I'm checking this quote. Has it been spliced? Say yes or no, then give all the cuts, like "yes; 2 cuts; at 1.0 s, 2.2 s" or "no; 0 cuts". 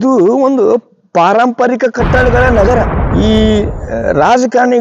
yes; 1 cut; at 3.0 s